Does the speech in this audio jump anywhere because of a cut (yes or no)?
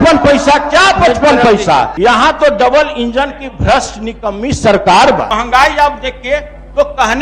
yes